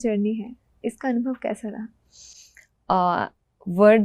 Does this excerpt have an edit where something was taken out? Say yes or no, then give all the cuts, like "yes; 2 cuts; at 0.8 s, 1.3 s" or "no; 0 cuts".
no; 0 cuts